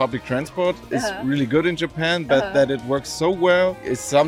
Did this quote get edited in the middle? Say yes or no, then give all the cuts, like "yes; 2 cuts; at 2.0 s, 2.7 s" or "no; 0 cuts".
no; 0 cuts